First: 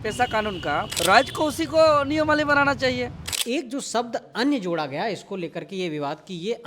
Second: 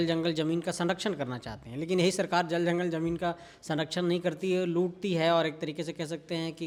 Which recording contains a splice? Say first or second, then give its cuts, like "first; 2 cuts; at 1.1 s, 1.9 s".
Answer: first; 2 cuts; at 0.9 s, 3.3 s